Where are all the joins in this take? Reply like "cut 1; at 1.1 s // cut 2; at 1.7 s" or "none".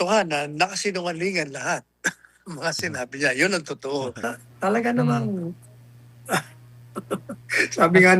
cut 1; at 4.3 s